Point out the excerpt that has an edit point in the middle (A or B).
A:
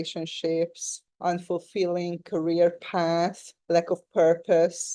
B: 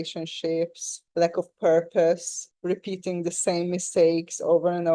B